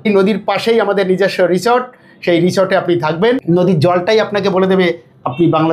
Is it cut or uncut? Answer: cut